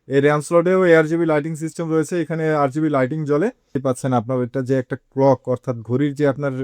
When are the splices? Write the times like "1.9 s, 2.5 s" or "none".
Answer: 3.8 s